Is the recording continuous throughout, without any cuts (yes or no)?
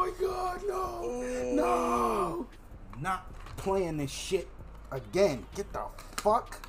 no